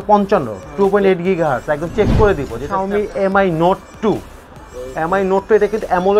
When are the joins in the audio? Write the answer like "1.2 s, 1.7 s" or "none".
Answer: 2.7 s